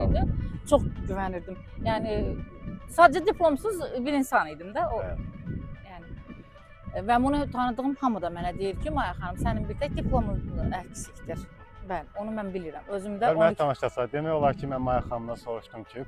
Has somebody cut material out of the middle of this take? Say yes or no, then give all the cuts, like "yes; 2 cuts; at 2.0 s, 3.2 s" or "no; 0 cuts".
no; 0 cuts